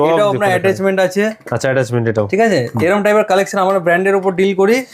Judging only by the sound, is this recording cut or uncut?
uncut